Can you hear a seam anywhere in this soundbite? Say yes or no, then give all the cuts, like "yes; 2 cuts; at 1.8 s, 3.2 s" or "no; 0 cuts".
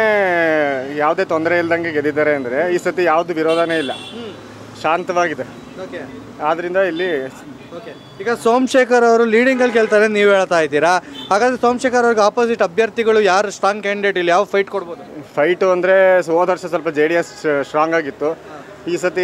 no; 0 cuts